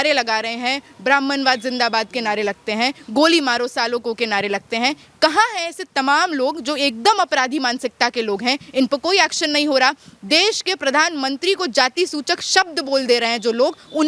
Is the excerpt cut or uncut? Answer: uncut